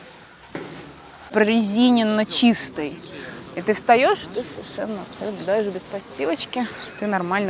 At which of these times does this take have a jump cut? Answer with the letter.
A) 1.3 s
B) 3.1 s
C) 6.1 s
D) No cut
A